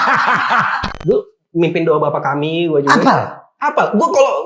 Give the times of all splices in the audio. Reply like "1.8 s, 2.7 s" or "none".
0.9 s